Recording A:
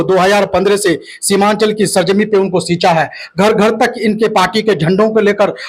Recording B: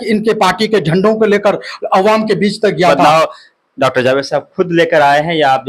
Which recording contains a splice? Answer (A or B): B